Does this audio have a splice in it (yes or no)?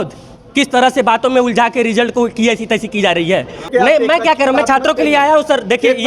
yes